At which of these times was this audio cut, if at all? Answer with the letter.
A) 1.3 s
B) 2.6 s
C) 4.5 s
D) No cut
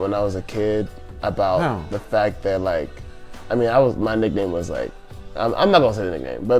D